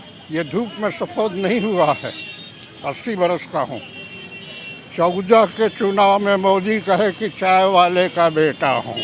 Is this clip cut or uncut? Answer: uncut